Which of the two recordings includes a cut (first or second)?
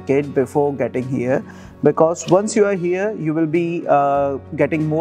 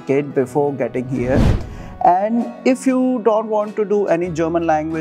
second